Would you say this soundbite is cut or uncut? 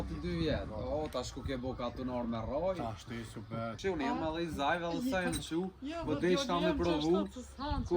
cut